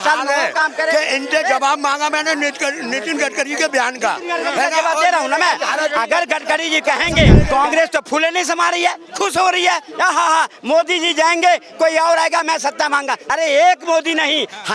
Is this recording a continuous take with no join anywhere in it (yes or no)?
no